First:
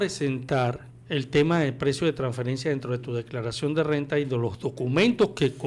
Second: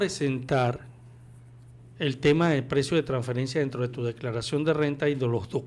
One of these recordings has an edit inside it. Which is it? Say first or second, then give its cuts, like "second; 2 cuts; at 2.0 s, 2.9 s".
first; 1 cut; at 0.9 s